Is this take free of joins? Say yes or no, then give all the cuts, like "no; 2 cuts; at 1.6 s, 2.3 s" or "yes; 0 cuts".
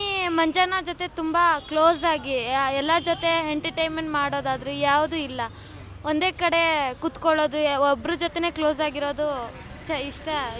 yes; 0 cuts